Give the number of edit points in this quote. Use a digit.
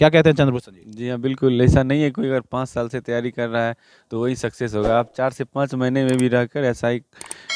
0